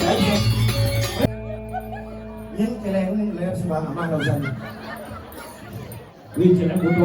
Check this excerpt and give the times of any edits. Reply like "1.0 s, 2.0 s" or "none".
1.3 s